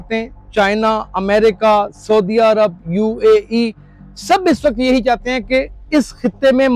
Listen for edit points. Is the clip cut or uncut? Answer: uncut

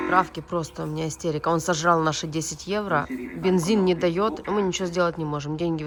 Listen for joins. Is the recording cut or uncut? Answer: uncut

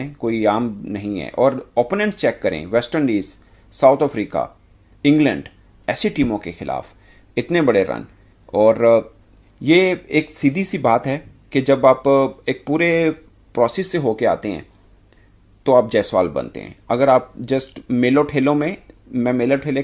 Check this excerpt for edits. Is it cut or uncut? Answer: uncut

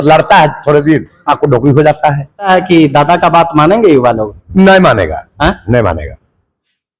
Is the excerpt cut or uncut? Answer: cut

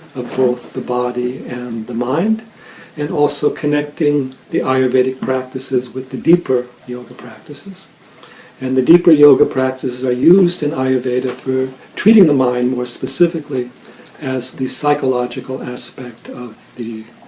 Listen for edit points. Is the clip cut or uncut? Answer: cut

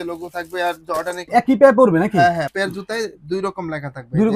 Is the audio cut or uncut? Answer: cut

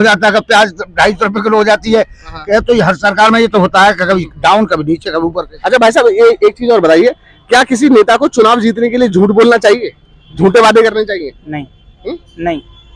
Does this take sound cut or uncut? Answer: uncut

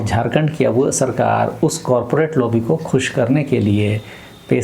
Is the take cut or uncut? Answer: uncut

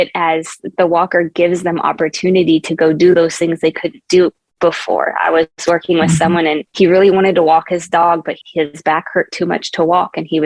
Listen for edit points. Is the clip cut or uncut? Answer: cut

